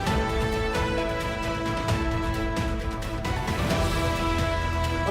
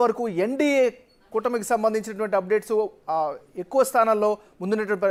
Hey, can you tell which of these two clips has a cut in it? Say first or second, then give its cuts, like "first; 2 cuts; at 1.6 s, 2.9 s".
first; 1 cut; at 1.1 s